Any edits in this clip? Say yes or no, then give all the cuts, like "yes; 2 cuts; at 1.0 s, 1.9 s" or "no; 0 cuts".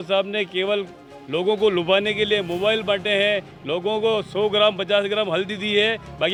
no; 0 cuts